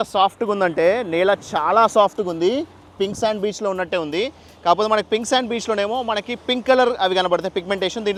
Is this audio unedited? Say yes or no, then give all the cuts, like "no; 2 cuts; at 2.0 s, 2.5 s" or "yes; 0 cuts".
yes; 0 cuts